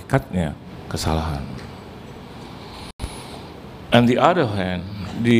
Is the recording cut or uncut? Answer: uncut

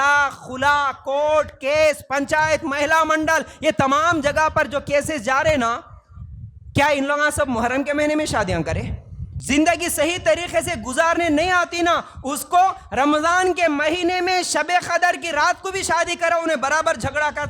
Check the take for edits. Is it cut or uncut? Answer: cut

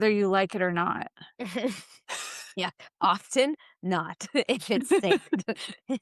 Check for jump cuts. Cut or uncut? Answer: uncut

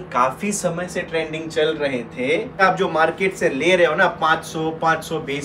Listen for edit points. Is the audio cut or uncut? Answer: cut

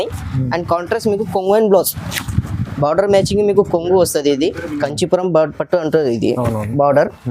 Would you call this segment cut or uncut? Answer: cut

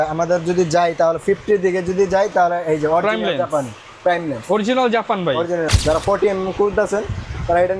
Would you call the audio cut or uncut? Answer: cut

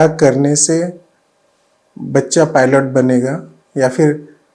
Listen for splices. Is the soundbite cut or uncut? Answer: uncut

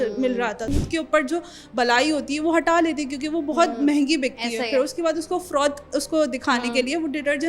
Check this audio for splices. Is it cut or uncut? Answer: cut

